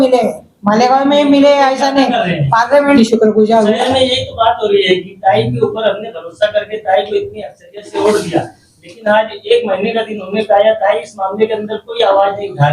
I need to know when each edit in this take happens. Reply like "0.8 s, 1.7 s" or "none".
3.0 s